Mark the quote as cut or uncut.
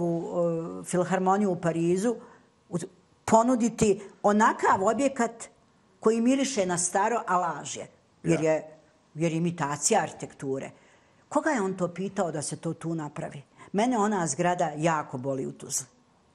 uncut